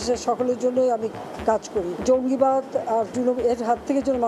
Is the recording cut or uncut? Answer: cut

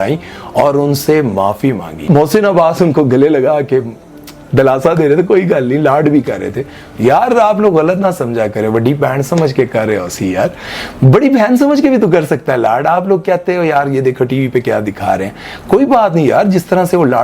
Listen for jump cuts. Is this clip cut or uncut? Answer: cut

